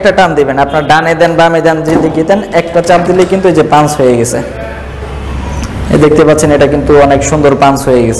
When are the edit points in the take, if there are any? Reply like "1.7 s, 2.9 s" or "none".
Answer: none